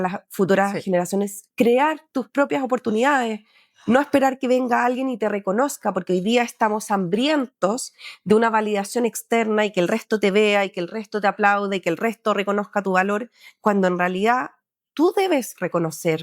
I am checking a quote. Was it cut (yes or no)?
no